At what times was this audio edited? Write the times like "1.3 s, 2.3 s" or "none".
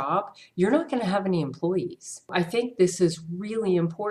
2.3 s